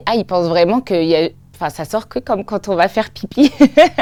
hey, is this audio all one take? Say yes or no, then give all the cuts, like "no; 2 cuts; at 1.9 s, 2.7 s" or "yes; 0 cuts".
yes; 0 cuts